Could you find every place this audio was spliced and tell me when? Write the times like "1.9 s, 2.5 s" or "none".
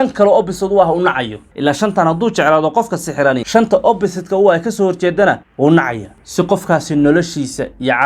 3.4 s